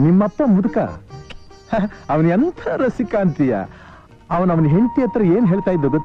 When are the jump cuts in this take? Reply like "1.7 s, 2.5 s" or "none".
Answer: none